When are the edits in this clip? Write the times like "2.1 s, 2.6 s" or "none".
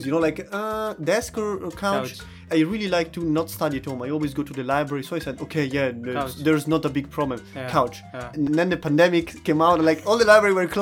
2.4 s, 8.4 s, 9.3 s

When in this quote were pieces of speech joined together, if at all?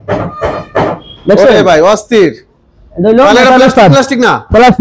none

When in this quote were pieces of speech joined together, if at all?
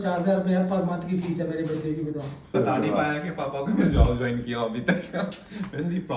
2.5 s

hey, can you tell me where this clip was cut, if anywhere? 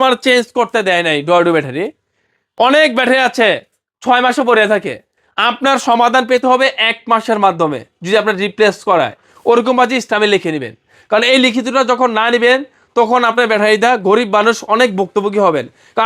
none

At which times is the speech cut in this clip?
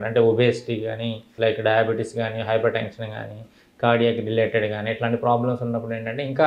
1.3 s

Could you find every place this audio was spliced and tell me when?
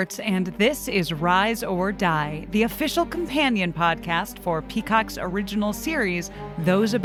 none

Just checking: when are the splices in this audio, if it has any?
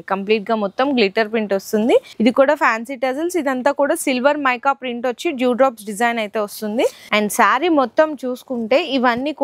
2.1 s, 7.0 s

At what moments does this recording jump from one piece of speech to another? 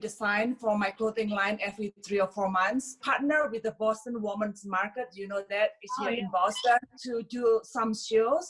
3.0 s, 7.0 s

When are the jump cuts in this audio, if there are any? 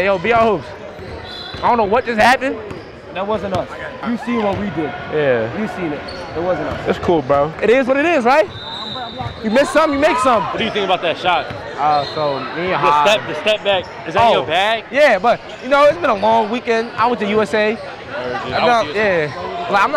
4.0 s, 7.5 s, 10.6 s

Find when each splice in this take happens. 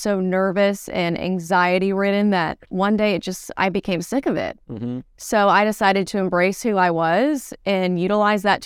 none

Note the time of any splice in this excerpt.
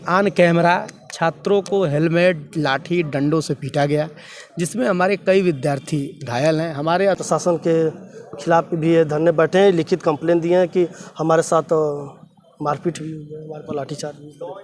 7.2 s

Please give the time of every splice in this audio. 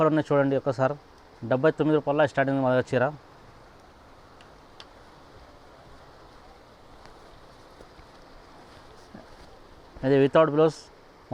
none

